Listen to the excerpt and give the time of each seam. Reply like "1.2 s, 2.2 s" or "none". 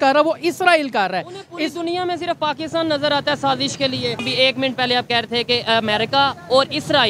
4.2 s